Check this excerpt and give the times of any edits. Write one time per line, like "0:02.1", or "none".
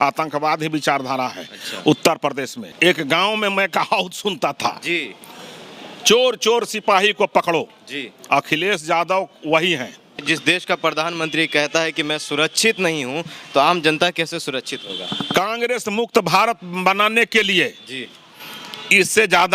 0:02.6
0:10.2